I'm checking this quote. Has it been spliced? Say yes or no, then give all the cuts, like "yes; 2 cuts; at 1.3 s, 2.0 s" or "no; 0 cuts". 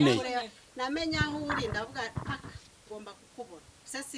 no; 0 cuts